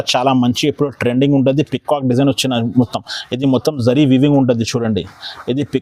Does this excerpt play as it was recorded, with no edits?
yes; 0 cuts

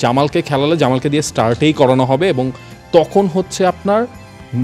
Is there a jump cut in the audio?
no; 0 cuts

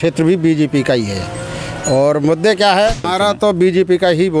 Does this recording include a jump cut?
no; 0 cuts

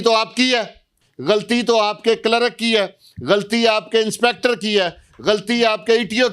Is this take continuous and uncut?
no; 1 cut; at 1.0 s

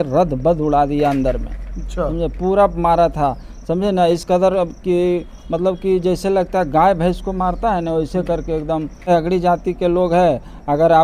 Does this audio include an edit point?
yes; 1 cut; at 9.1 s

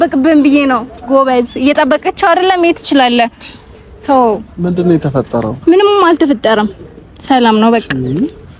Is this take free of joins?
yes; 0 cuts

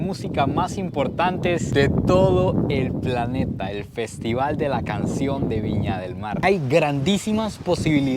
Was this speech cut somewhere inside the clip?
yes; 1 cut; at 6.4 s

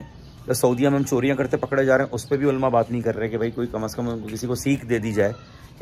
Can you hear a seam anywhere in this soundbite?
no; 0 cuts

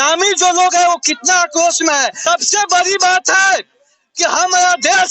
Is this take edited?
yes; 1 cut; at 2.2 s

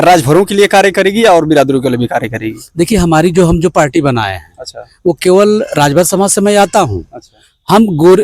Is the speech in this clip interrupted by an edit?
no; 0 cuts

